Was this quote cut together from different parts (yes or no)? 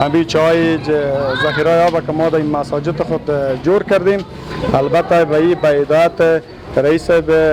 no